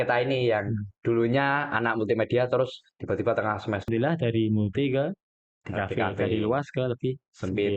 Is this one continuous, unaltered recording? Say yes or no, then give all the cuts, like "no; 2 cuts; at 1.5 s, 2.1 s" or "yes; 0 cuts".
no; 1 cut; at 3.8 s